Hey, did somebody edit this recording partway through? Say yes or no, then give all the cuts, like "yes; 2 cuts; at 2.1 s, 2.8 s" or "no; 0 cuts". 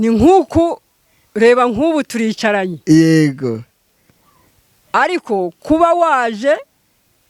no; 0 cuts